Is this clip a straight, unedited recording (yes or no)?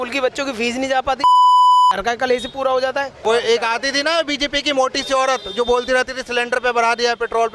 no